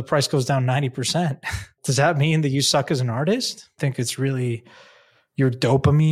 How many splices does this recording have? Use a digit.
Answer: 2